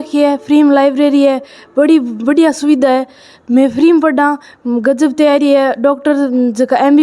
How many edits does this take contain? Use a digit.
0